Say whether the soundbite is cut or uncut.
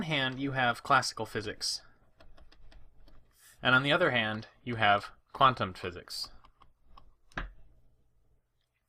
cut